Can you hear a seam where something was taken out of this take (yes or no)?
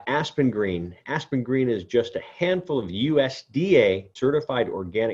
yes